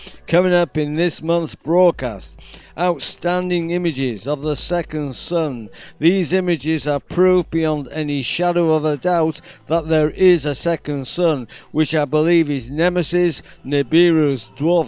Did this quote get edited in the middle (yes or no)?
no